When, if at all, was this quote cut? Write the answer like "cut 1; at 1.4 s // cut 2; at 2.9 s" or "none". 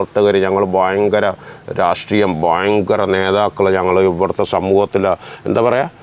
none

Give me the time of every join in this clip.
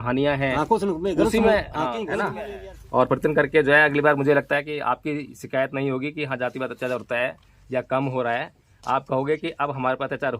cut 1; at 2.4 s

